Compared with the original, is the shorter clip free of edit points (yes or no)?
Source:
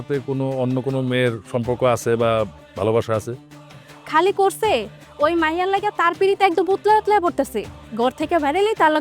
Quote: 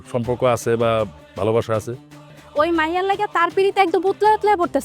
no